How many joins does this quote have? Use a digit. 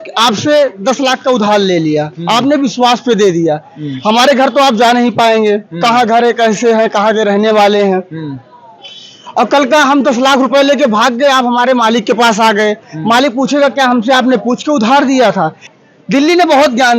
1